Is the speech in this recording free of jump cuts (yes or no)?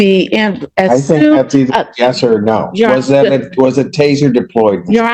yes